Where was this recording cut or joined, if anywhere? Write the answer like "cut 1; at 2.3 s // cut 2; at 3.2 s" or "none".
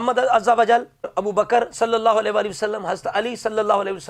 cut 1; at 1.1 s